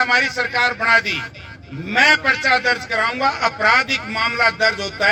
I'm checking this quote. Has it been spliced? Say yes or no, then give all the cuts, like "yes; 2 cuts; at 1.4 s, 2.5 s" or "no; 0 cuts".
no; 0 cuts